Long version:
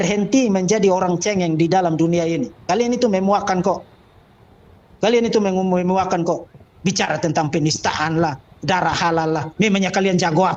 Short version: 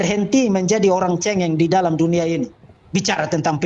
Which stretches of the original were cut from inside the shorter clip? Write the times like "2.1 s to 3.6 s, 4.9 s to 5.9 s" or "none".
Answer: 2.6 s to 6.5 s